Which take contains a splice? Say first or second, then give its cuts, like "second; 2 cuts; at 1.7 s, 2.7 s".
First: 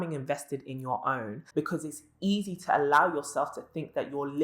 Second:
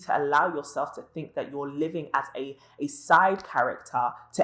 first; 1 cut; at 1.4 s